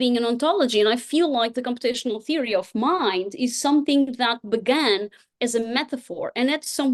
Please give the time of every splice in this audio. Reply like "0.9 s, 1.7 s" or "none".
none

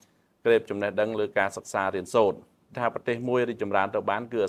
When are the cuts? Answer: 2.7 s

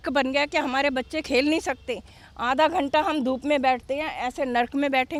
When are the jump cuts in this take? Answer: none

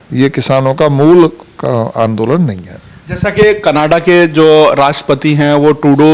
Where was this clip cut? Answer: none

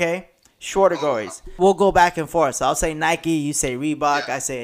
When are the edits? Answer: 1.6 s

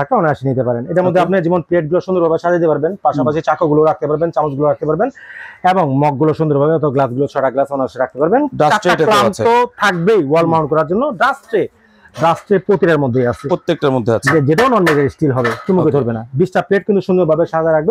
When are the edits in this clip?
none

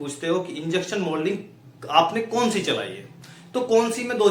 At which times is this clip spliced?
none

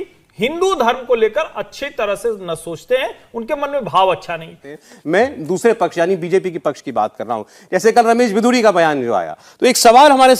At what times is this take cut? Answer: none

